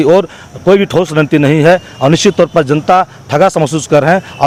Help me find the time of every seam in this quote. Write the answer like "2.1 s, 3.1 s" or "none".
none